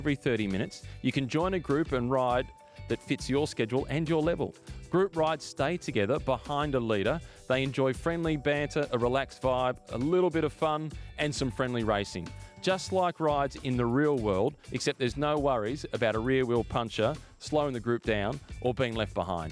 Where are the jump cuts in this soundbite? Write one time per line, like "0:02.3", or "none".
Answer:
none